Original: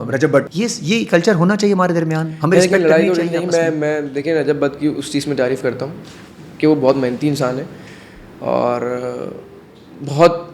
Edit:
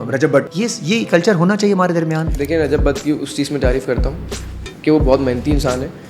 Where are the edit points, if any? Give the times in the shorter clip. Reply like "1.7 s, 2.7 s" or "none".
2.3 s